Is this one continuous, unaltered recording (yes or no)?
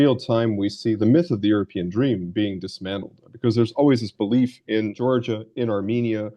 no